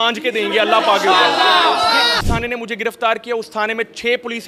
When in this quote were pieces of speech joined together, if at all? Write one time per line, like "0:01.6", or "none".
0:02.2